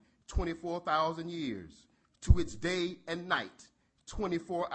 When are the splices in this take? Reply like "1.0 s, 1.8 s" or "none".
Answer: none